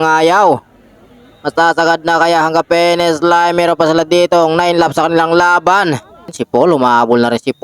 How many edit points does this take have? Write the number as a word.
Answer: one